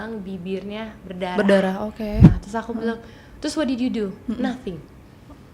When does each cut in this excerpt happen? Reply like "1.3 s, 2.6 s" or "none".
2.4 s